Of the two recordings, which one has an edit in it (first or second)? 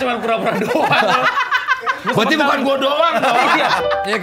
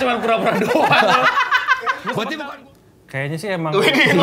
second